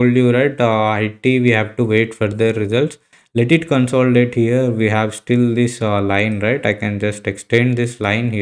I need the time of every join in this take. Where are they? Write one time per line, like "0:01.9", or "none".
0:03.1